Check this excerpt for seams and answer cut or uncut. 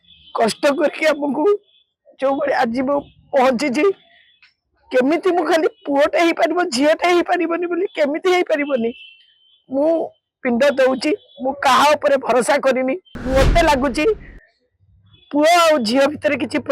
cut